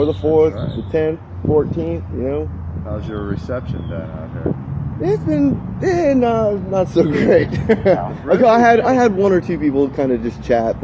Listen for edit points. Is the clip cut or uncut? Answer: uncut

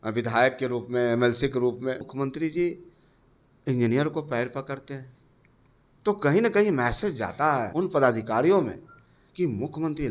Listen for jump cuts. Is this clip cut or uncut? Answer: cut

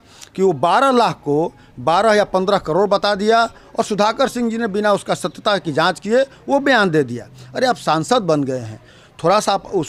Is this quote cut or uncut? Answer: uncut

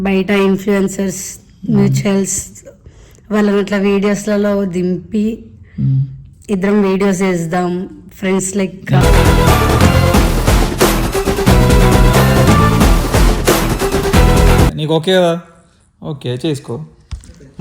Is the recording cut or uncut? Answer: cut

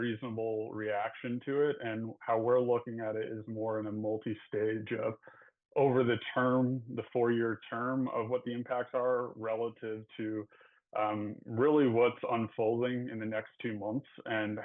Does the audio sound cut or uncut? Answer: uncut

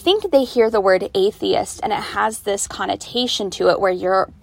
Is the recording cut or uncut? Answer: uncut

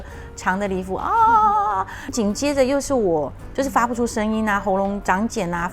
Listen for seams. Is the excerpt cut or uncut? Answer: cut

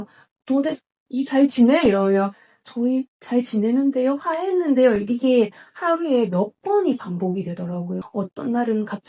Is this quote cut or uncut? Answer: uncut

